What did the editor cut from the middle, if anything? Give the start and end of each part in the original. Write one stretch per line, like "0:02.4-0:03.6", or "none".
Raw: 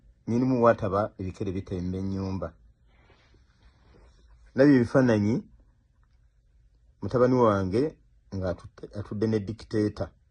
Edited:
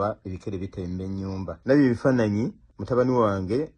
0:02.5-0:04.5
0:05.6-0:06.9